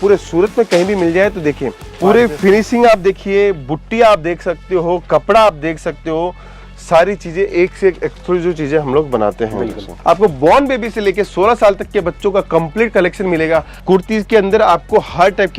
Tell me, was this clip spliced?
yes; 3 cuts; at 2.0 s, 9.9 s, 13.7 s

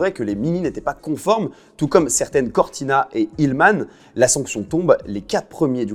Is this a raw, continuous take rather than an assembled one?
yes; 0 cuts

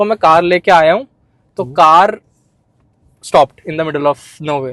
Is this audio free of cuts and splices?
yes; 0 cuts

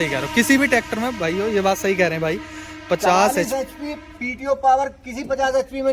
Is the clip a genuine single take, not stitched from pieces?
yes; 0 cuts

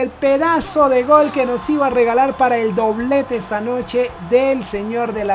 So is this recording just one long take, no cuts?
yes; 0 cuts

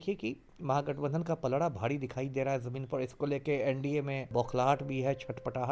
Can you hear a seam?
yes; 1 cut; at 4.3 s

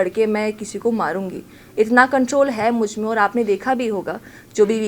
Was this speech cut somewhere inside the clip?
no; 0 cuts

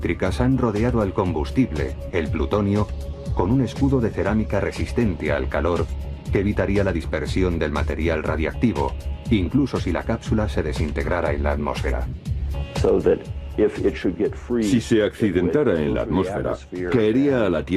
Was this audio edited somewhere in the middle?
no; 0 cuts

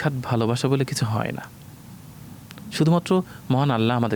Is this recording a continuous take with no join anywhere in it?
yes; 0 cuts

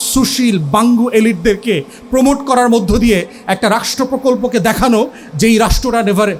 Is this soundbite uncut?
yes; 0 cuts

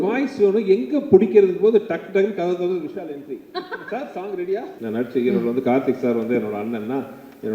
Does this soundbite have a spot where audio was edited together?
yes; 1 cut; at 4.7 s

